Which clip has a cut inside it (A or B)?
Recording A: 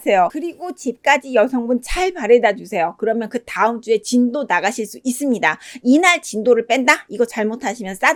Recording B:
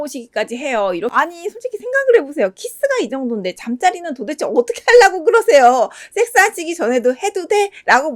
B